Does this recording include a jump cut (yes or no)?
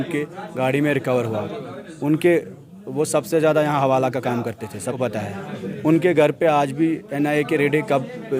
yes